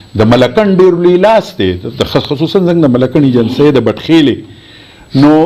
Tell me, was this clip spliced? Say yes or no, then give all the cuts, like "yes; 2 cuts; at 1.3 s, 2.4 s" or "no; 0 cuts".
no; 0 cuts